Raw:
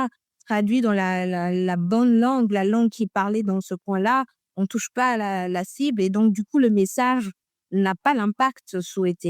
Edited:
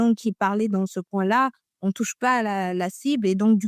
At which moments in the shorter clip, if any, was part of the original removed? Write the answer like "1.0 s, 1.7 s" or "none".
none